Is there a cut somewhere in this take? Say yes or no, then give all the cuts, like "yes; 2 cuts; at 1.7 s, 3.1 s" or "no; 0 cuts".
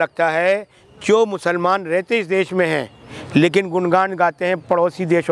no; 0 cuts